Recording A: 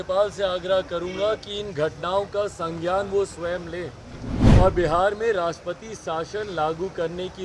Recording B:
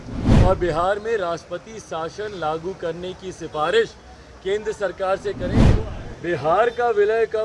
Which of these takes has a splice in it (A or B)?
B